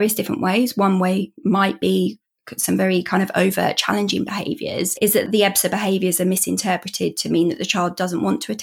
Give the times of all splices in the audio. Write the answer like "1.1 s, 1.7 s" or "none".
5.3 s